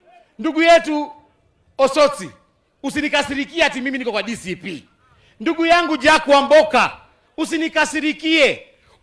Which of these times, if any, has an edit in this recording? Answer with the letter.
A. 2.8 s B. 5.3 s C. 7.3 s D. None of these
D